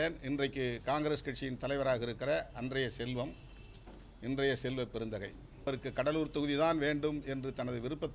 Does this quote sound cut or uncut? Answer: cut